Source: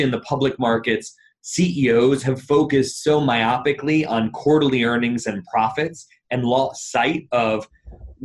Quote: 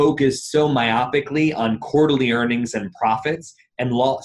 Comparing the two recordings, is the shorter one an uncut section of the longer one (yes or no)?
yes